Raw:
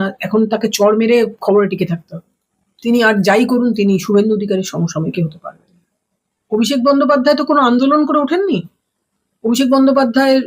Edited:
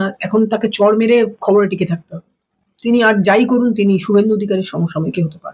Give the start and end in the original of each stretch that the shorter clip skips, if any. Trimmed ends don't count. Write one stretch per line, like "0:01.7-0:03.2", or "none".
none